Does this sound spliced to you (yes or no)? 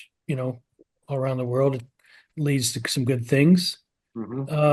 no